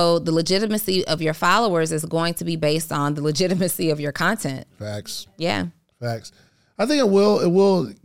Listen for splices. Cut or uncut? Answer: uncut